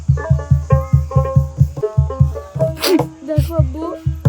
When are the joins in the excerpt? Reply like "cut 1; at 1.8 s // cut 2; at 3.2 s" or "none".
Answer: cut 1; at 1.7 s